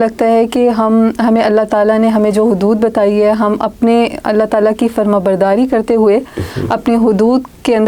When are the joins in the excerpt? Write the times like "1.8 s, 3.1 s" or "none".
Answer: none